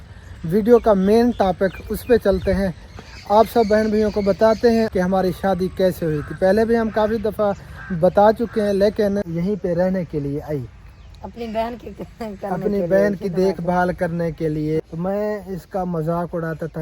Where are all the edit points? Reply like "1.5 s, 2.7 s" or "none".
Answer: 4.9 s, 9.3 s, 14.8 s